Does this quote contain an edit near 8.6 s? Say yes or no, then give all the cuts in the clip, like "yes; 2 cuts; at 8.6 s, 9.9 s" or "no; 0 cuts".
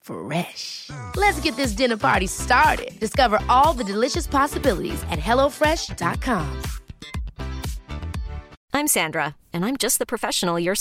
yes; 1 cut; at 8.6 s